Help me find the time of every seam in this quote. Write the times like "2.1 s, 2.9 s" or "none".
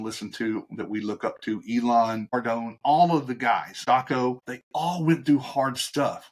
2.2 s, 3.7 s, 4.5 s